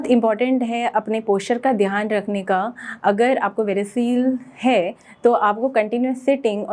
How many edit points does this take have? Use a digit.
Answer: 0